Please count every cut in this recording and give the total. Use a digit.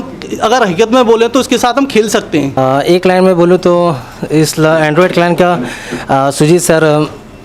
1